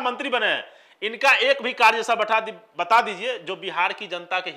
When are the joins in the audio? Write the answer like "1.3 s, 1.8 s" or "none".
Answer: none